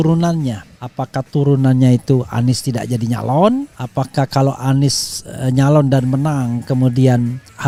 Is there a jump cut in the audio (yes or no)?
no